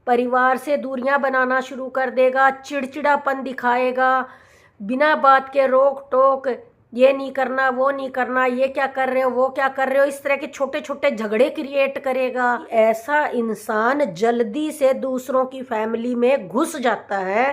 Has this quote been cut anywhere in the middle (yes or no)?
yes